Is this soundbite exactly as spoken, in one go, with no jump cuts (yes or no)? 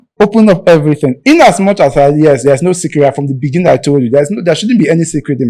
yes